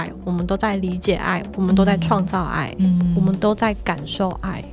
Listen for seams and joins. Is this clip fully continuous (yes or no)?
yes